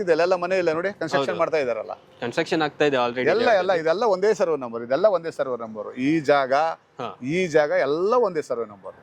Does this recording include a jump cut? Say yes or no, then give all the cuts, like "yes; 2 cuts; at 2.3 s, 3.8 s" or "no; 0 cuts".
no; 0 cuts